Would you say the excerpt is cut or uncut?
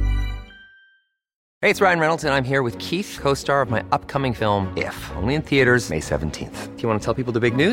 cut